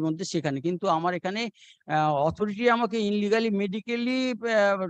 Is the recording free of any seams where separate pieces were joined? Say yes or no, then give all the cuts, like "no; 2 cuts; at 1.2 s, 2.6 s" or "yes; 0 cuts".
yes; 0 cuts